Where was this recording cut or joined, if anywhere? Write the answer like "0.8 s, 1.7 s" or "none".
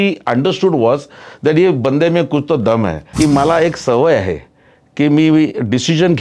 3.0 s